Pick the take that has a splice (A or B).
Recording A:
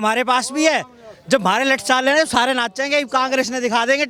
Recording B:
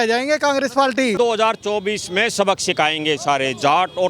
B